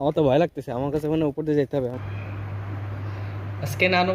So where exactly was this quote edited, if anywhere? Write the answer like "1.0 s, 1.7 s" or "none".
1.9 s